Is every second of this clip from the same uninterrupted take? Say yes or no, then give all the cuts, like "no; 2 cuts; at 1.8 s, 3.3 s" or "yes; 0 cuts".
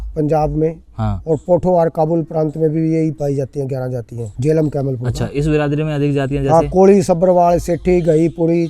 no; 1 cut; at 4.2 s